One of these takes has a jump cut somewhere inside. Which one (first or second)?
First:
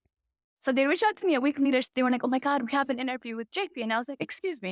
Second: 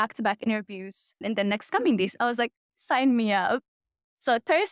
second